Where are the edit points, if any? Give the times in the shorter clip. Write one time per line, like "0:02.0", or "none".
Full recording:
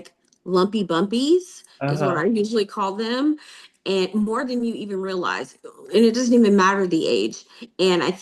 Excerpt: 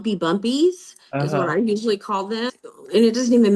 0:02.5